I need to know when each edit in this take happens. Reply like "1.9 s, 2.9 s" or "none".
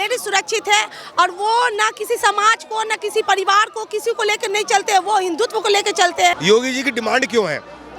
6.3 s